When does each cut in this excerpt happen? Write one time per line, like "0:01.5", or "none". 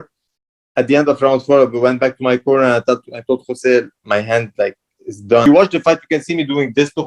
0:05.4